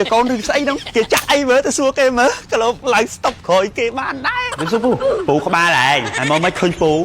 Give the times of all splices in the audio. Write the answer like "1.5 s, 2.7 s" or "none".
0.8 s, 2.8 s, 4.6 s, 6.1 s